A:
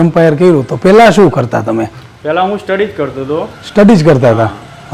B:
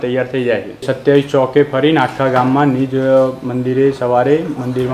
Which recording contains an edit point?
B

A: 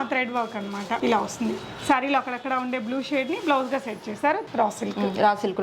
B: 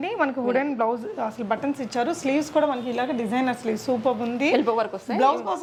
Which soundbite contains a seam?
A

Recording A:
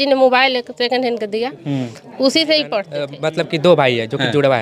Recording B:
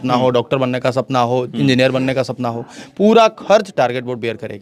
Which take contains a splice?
A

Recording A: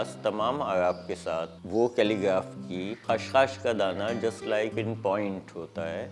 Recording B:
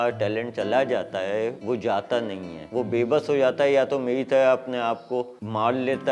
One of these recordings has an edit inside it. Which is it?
A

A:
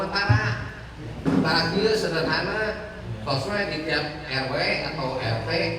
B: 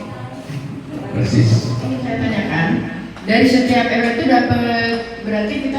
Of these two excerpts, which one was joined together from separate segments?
B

